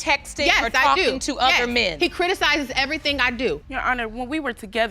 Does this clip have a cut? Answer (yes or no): yes